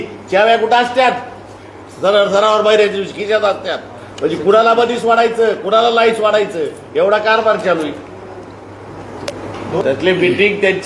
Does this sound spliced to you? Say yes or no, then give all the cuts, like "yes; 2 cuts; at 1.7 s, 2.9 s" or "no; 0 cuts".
yes; 1 cut; at 9.8 s